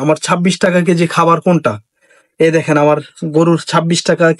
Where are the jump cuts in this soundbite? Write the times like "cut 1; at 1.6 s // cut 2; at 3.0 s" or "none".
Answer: none